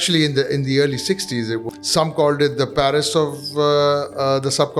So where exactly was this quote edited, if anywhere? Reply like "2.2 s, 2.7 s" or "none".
1.6 s